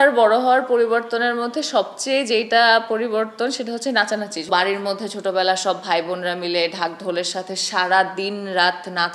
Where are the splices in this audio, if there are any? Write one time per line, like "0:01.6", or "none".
0:04.5